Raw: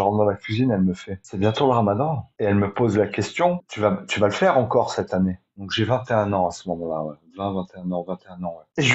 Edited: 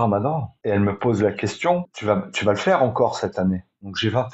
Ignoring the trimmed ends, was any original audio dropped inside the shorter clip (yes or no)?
no